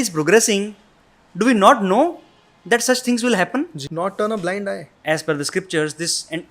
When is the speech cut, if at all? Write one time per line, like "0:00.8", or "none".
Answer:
0:03.8
0:04.9